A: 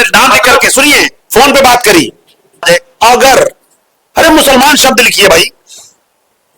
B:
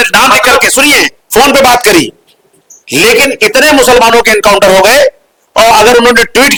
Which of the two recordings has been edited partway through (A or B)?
A